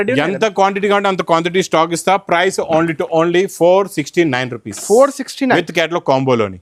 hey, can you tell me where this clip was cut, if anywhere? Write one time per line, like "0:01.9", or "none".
none

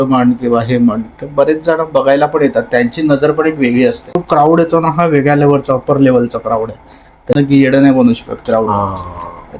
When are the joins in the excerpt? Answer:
0:04.2
0:07.4

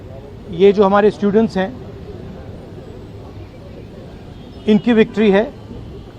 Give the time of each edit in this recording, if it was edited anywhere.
0:04.2

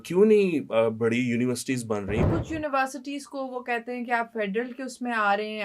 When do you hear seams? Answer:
0:02.2

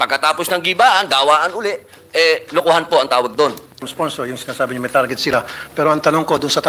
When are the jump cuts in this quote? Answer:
0:03.9

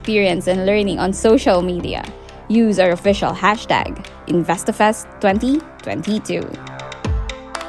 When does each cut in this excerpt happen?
0:06.7

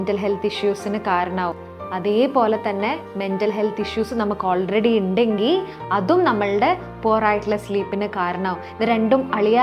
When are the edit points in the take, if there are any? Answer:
none

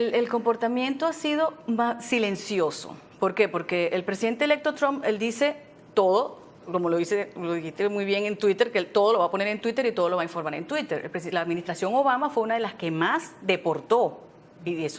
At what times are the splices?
0:01.4

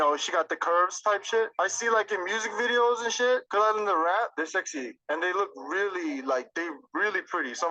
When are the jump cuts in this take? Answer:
0:06.8

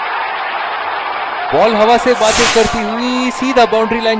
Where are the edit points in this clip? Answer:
0:01.5

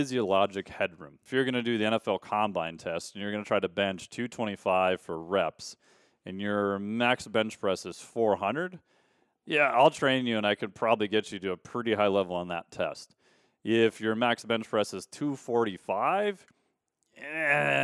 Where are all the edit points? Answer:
0:01.1

